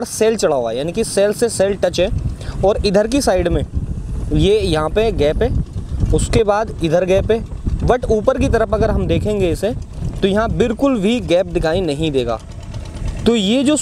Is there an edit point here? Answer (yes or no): no